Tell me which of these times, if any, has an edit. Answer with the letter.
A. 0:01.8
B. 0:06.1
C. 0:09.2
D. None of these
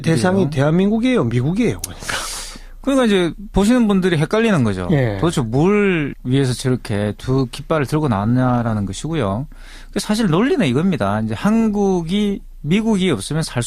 D